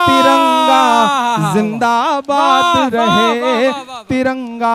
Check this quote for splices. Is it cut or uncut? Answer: uncut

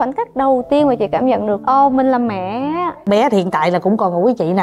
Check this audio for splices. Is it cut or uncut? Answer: cut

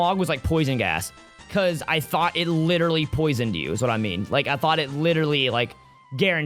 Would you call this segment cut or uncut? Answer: uncut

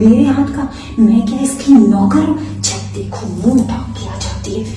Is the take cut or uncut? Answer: uncut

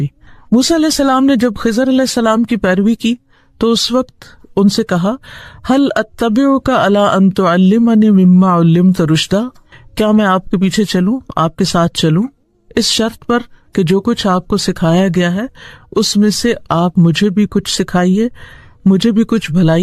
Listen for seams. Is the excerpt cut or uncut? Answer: uncut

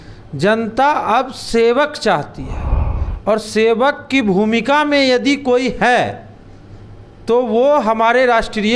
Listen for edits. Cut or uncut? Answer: uncut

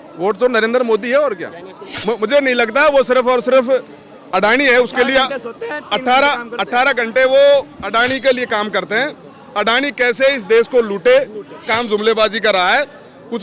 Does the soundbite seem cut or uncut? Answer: cut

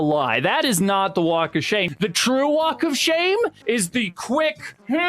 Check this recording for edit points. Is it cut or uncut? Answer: cut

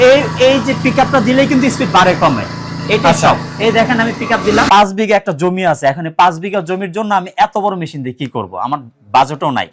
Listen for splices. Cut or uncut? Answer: cut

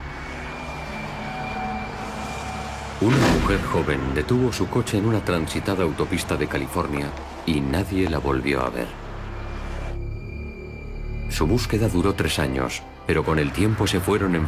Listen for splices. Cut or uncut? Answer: cut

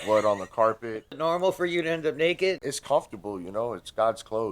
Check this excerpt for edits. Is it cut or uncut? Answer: cut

